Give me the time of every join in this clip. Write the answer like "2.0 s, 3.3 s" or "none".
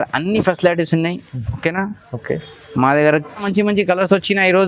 3.4 s